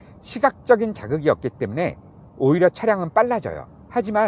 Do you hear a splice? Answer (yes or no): no